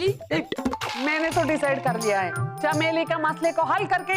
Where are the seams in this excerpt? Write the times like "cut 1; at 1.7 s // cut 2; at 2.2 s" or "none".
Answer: cut 1; at 0.9 s // cut 2; at 2.4 s